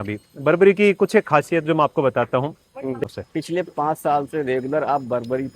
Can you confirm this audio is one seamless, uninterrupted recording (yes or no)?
no